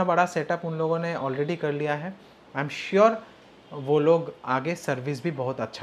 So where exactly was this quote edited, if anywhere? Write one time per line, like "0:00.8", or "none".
none